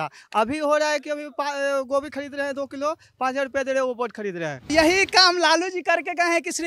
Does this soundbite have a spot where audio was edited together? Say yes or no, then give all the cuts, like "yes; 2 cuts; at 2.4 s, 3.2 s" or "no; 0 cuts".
yes; 1 cut; at 4.7 s